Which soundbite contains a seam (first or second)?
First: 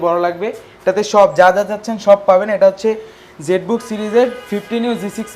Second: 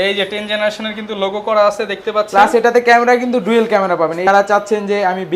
second